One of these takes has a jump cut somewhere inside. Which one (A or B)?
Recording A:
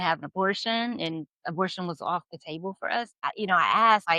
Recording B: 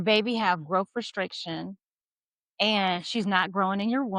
A